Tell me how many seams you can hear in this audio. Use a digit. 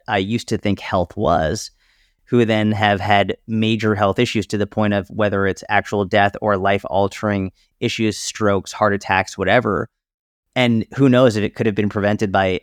0